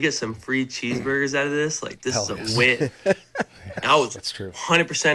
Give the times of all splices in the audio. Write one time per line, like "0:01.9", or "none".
none